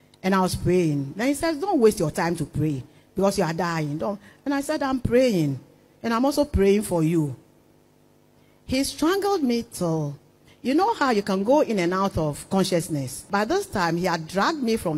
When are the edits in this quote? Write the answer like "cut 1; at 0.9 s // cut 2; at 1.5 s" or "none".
cut 1; at 13.1 s